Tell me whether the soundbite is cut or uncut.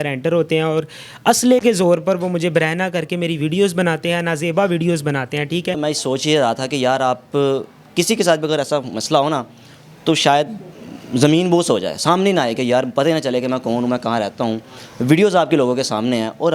cut